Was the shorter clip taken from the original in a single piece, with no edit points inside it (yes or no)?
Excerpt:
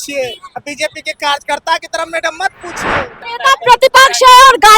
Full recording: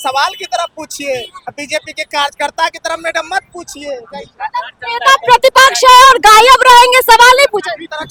no